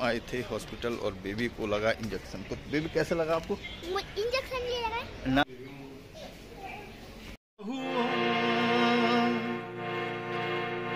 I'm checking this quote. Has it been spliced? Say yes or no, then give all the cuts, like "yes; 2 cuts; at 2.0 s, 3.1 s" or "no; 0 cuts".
no; 0 cuts